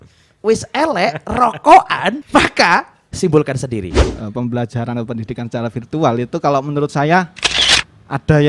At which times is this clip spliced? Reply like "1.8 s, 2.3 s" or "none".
2.2 s, 3.0 s, 4.0 s